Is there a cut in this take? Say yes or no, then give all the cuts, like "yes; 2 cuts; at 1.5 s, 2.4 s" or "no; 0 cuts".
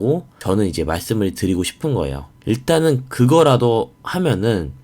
yes; 1 cut; at 2.3 s